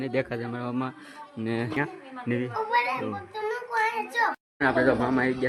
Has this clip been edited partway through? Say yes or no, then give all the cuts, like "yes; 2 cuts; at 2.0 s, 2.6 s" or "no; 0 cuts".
yes; 1 cut; at 1.8 s